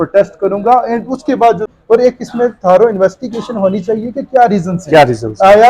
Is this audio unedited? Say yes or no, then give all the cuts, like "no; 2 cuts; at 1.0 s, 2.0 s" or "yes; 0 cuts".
no; 1 cut; at 1.7 s